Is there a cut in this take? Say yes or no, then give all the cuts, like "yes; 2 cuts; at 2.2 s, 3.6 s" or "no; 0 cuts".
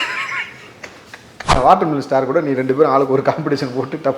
yes; 1 cut; at 1.6 s